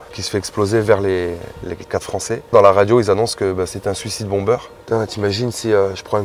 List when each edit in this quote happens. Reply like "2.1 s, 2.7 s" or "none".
2.5 s, 4.7 s